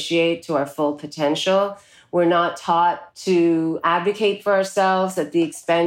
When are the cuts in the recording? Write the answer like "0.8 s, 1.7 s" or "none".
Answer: 3.1 s